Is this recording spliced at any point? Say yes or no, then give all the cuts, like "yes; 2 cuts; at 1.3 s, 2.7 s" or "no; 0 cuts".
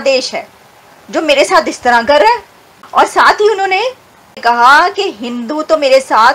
yes; 1 cut; at 4.4 s